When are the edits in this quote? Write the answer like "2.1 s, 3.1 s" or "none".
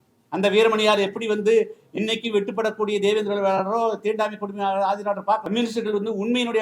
5.4 s